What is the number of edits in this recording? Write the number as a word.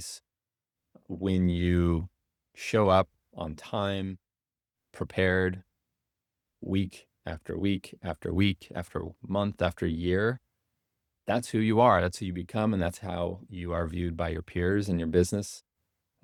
zero